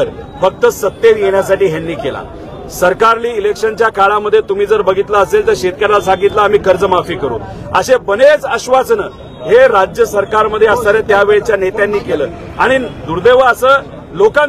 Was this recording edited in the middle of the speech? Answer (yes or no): no